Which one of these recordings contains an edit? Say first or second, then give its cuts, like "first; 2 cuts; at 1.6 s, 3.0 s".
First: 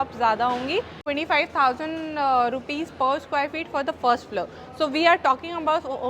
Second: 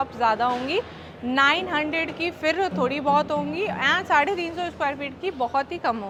first; 1 cut; at 1.0 s